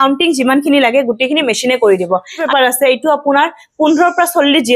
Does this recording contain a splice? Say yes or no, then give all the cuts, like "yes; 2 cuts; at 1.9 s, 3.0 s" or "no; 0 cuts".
yes; 1 cut; at 2.4 s